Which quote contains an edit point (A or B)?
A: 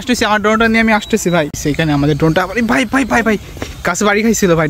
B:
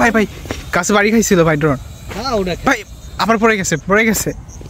A